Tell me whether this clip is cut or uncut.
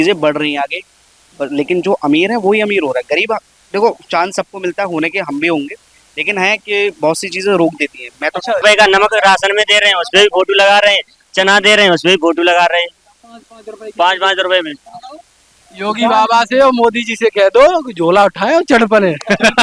cut